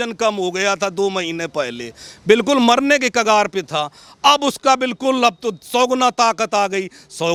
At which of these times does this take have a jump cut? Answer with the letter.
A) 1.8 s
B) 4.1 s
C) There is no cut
C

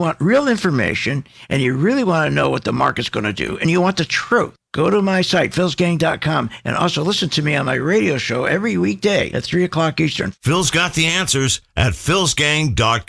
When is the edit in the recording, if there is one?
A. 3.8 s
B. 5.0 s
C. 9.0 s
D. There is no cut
D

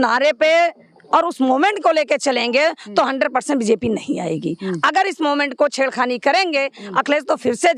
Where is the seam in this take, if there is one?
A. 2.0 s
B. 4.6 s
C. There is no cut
C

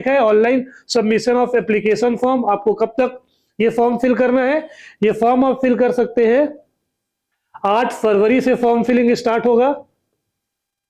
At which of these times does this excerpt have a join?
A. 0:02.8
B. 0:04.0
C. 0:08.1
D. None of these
D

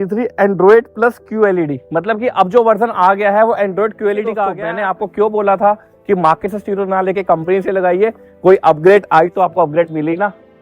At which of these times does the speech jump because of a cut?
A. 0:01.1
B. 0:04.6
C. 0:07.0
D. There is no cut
B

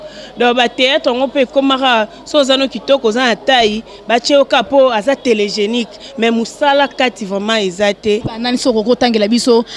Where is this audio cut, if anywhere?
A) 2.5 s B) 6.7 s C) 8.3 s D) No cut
C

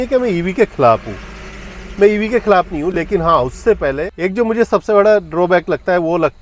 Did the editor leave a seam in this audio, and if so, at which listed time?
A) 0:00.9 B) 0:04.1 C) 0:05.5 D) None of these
B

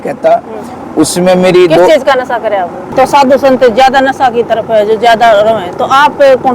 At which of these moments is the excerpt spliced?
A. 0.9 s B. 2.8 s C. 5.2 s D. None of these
B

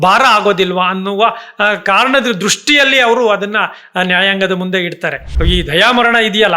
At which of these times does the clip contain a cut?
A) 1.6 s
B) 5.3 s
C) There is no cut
B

